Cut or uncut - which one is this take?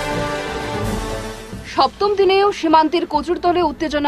cut